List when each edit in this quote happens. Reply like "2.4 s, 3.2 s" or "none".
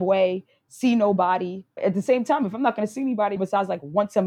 1.6 s, 3.3 s